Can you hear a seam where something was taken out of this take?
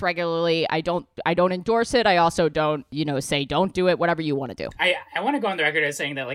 yes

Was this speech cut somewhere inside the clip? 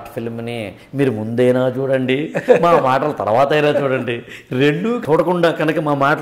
yes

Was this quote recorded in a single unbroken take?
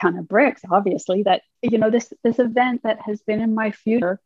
no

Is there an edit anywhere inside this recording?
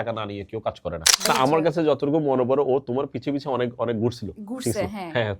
yes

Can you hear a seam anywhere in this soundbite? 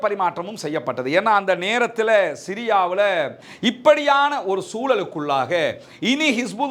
yes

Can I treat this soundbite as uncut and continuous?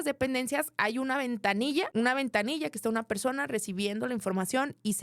no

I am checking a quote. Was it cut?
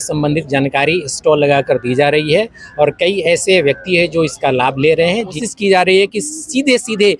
yes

